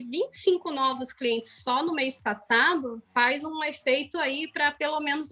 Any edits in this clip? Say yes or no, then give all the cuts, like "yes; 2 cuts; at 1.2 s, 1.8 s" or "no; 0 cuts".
no; 0 cuts